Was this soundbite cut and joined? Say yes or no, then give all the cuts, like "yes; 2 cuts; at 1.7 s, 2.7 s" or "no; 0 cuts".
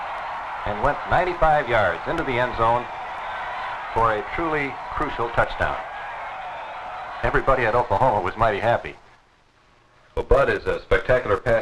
no; 0 cuts